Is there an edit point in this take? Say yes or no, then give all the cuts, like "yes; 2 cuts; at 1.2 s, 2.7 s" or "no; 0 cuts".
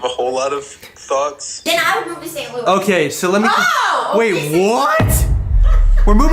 yes; 1 cut; at 1.5 s